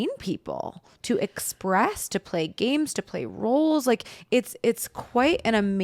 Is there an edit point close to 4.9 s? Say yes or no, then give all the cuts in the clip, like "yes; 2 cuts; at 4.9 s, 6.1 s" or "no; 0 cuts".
no; 0 cuts